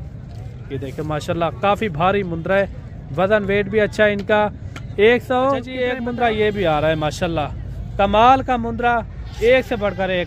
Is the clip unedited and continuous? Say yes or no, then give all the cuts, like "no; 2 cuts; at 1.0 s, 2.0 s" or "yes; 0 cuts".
no; 1 cut; at 6.0 s